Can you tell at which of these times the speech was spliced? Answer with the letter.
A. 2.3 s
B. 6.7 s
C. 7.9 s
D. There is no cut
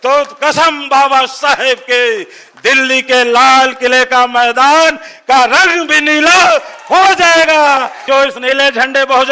C